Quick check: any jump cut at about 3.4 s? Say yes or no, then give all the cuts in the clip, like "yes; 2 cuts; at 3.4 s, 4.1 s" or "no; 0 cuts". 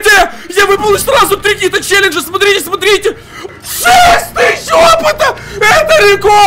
yes; 1 cut; at 3.4 s